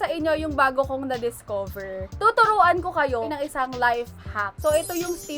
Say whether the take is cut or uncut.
cut